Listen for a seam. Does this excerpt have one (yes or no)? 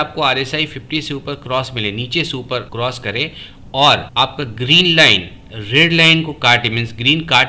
yes